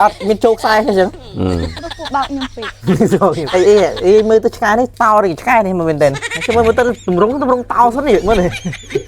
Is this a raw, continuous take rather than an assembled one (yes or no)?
no